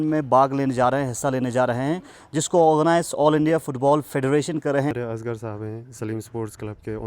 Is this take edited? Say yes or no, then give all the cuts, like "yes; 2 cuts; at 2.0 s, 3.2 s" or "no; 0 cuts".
yes; 1 cut; at 4.9 s